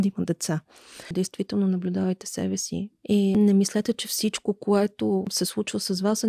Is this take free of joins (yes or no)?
no